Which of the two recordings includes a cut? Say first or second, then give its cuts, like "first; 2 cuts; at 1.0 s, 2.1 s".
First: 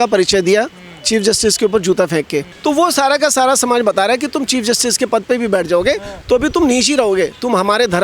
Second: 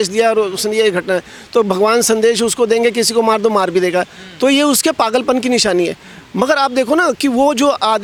first; 1 cut; at 2.5 s